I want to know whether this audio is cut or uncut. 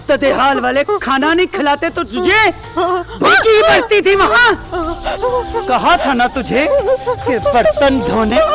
cut